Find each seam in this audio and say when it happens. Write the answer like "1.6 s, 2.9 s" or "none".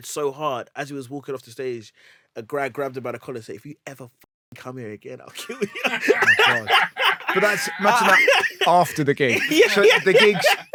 none

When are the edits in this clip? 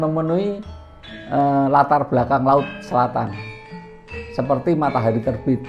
none

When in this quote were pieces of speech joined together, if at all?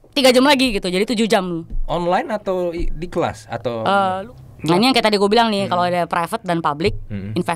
4.2 s

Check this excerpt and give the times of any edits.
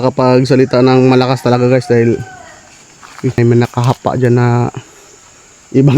3.4 s

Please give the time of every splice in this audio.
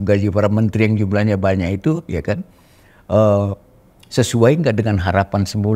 none

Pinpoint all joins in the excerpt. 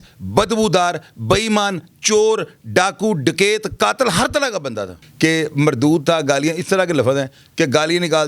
5.0 s

